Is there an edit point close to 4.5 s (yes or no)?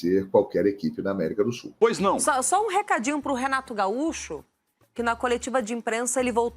no